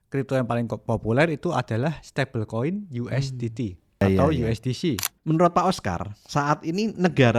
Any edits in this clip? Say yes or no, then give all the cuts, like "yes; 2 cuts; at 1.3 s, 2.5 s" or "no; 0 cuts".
yes; 2 cuts; at 4.0 s, 5.1 s